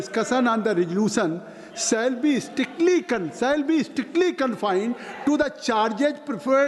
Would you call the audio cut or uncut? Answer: uncut